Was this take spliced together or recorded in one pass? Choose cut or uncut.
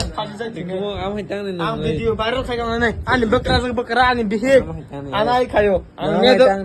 uncut